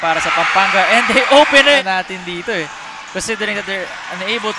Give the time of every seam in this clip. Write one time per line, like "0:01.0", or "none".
0:01.8